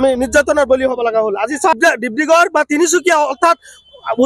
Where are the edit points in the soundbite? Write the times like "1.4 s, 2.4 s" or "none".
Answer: 1.8 s